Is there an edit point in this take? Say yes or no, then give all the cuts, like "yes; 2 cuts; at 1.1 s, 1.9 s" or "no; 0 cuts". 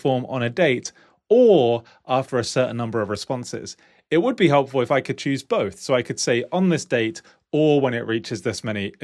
no; 0 cuts